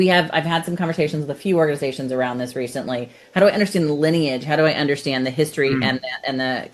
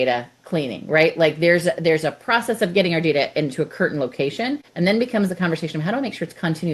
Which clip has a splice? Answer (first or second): second